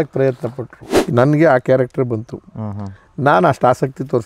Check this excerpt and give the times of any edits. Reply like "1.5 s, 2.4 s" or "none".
0.9 s